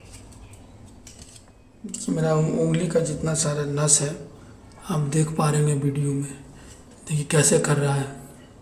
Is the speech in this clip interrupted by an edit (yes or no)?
yes